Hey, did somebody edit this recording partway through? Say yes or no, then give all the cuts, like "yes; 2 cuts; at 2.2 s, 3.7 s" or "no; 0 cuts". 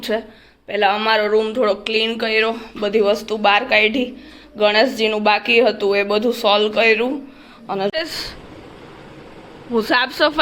yes; 1 cut; at 7.9 s